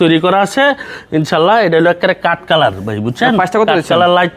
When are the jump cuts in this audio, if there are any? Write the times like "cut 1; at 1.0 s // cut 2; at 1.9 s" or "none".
none